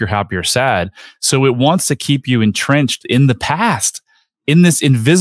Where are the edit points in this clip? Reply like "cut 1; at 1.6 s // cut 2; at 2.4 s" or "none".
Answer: cut 1; at 3.0 s